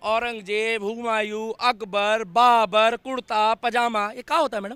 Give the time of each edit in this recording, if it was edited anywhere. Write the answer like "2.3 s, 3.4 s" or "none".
none